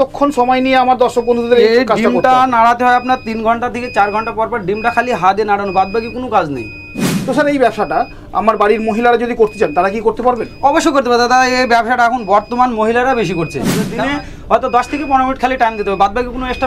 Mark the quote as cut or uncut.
cut